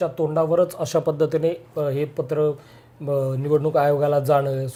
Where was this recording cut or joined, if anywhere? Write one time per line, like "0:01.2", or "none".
none